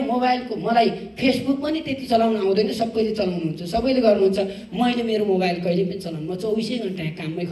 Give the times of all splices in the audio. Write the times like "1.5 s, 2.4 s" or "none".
none